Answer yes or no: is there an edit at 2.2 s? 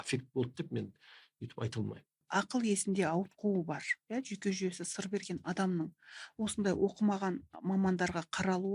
yes